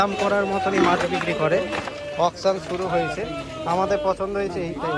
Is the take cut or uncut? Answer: uncut